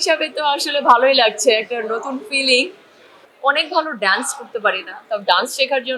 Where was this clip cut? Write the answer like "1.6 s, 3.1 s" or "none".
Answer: 3.2 s

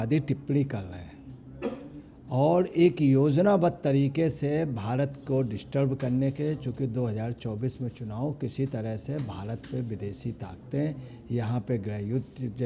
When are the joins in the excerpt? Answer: none

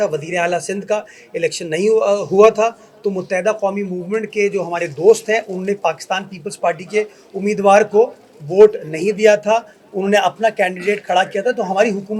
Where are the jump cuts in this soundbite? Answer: none

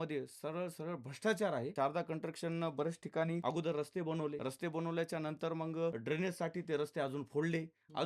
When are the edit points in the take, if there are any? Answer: 1.7 s, 3.4 s, 4.4 s, 6.0 s

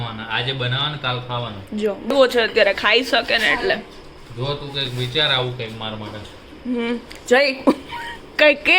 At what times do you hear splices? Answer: 2.1 s

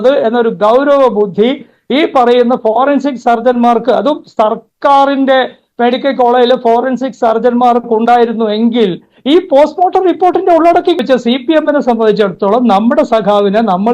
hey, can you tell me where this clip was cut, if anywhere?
11.0 s

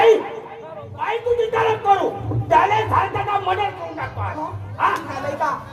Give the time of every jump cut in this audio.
none

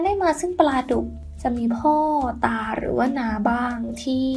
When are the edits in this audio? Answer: 1.2 s

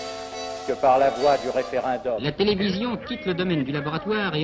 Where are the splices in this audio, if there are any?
2.2 s

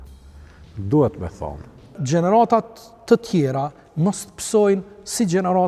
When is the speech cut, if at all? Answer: 1.9 s

